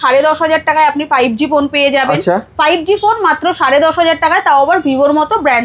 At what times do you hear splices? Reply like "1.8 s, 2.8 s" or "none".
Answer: none